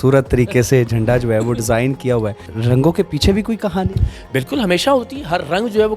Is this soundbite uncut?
no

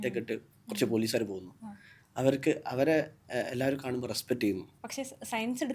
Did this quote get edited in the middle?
yes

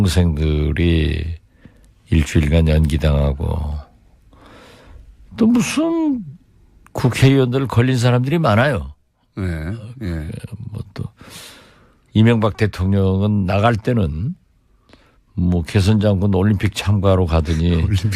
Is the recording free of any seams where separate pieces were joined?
no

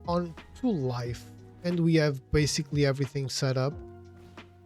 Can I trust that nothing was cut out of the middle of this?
no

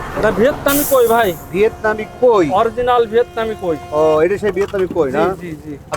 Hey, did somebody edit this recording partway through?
no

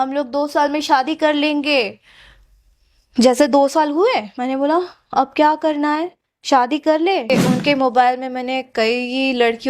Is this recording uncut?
no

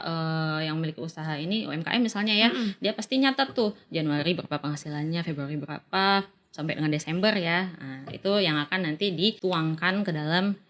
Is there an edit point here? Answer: yes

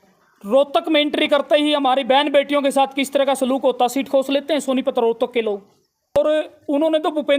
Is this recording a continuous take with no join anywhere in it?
no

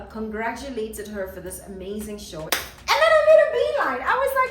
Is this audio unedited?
no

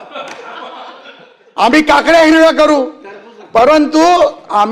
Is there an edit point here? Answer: no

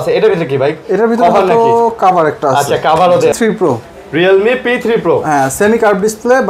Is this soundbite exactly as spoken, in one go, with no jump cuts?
no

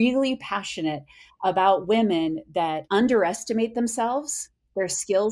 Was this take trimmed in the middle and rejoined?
yes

